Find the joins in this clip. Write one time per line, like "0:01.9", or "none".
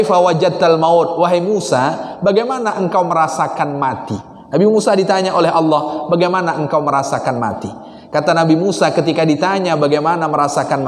none

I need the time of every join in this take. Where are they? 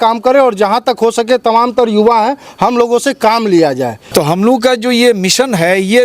0:04.0

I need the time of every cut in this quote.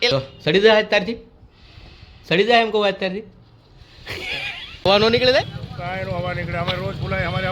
0:04.9

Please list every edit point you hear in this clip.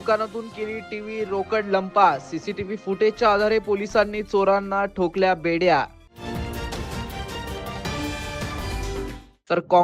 none

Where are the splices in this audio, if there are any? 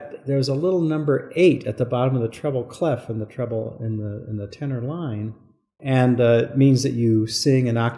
0:05.7

